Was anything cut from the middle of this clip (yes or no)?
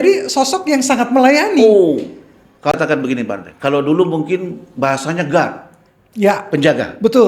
yes